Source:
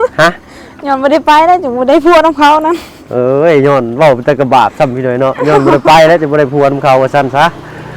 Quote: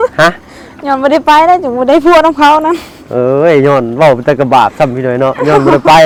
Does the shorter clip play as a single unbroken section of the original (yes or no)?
yes